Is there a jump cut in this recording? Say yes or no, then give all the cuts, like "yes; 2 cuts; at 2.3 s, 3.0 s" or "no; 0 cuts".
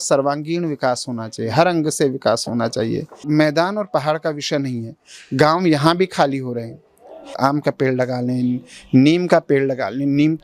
yes; 2 cuts; at 3.1 s, 7.3 s